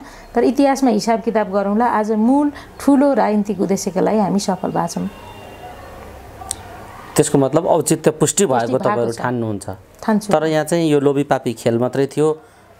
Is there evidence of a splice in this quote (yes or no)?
no